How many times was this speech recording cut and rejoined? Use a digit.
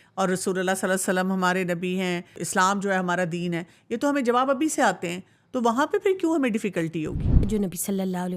2